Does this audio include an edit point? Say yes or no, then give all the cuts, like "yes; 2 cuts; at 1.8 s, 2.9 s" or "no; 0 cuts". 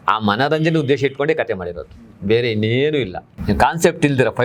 yes; 1 cut; at 3.3 s